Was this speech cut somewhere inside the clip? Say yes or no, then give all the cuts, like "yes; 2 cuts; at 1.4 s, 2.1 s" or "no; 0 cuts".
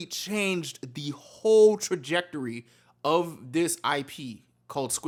no; 0 cuts